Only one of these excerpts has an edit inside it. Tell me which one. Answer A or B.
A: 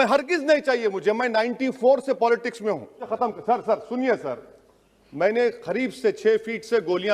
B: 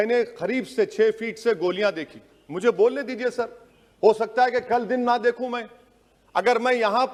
A